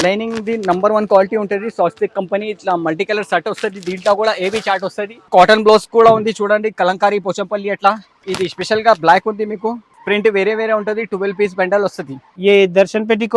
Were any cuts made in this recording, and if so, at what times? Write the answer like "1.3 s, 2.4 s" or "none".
5.3 s, 8.1 s, 9.9 s, 12.3 s